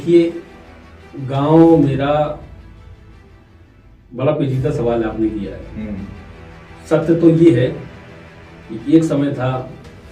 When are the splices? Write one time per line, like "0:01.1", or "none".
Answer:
none

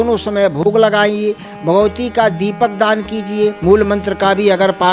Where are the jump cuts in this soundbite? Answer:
0:03.6

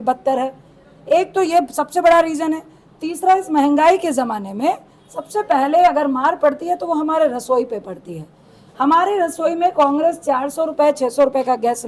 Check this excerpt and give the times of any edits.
none

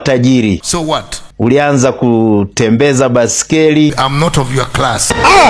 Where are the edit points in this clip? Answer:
none

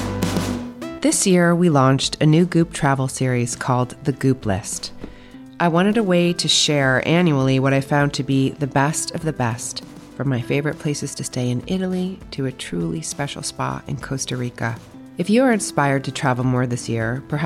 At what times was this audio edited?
0:00.9

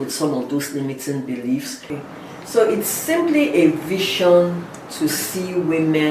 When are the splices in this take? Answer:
0:01.9

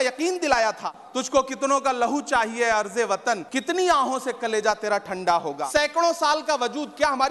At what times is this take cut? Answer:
0:01.0
0:03.5
0:05.6

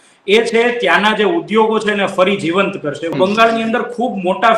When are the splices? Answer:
0:03.1

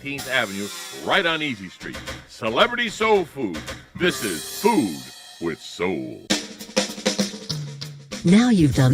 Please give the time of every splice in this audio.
0:06.2

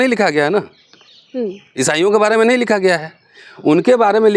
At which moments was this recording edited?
none

